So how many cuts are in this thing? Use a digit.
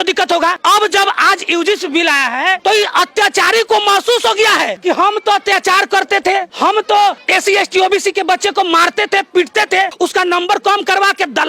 3